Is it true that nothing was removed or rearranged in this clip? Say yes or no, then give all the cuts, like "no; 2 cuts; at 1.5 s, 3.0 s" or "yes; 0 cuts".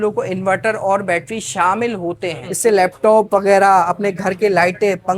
no; 1 cut; at 2.4 s